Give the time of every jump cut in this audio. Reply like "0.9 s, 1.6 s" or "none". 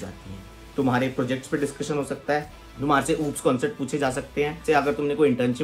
2.6 s, 4.6 s